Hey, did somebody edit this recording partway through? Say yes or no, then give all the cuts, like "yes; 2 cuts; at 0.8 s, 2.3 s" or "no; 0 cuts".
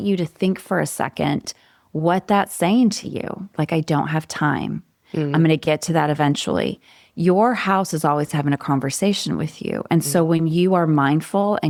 no; 0 cuts